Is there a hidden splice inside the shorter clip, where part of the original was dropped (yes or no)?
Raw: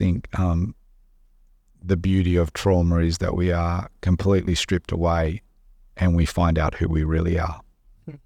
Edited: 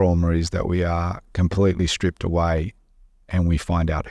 no